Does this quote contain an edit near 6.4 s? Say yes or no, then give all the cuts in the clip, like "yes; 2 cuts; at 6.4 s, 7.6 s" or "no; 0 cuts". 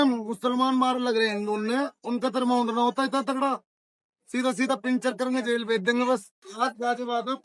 yes; 1 cut; at 6.4 s